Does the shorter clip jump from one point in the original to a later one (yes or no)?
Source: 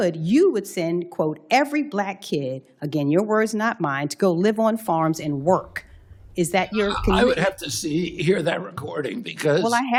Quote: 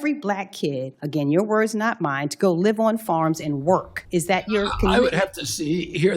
yes